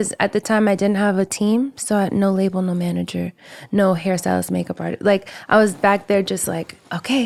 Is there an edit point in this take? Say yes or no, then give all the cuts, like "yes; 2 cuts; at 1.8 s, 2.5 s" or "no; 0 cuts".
no; 0 cuts